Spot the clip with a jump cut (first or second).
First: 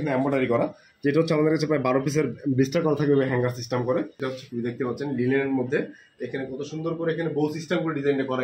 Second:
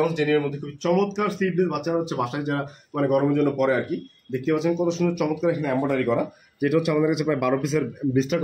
first